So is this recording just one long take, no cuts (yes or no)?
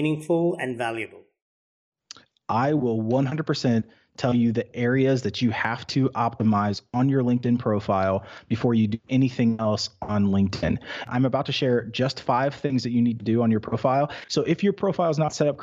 no